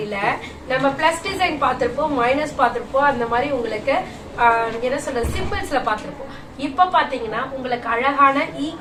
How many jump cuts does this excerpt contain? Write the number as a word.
zero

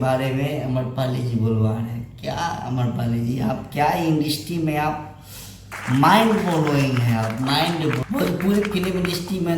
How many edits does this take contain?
one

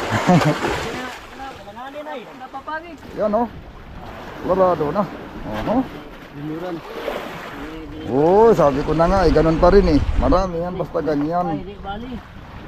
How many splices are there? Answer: one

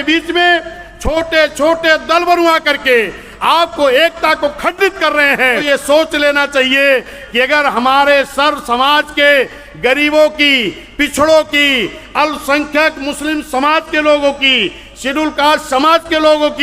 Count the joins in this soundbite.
one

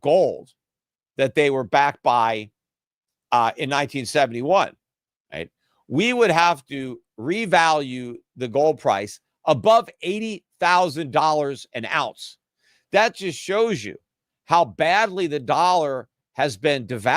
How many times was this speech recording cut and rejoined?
zero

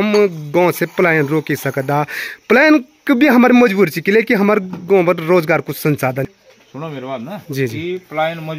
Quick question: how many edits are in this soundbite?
one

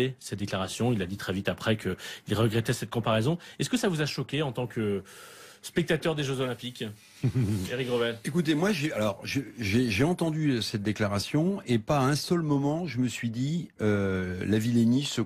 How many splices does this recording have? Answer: one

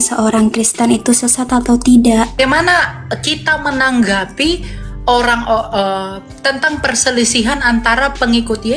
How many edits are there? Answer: one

